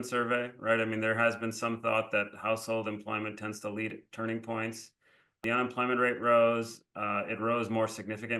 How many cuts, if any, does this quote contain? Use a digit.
1